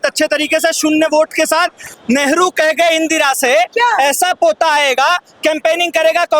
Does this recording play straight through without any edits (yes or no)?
no